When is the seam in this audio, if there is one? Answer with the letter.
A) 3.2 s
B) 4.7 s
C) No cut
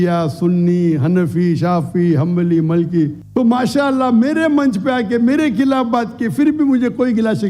A